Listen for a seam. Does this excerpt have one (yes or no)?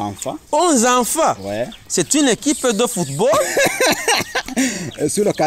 no